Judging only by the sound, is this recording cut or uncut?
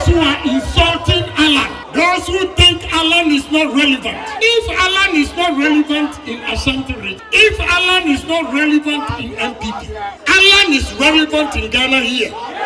cut